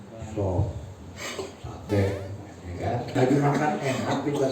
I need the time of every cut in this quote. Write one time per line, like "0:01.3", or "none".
0:01.4
0:03.1